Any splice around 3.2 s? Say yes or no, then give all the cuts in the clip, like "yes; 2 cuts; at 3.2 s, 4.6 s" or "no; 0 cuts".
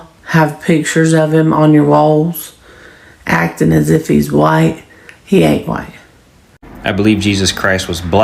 no; 1 cut; at 6.8 s